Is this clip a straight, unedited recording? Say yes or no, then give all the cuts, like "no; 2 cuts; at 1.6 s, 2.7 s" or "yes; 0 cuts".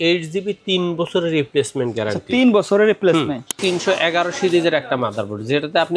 no; 1 cut; at 3.6 s